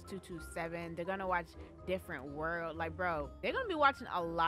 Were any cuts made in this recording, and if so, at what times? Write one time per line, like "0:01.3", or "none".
0:03.3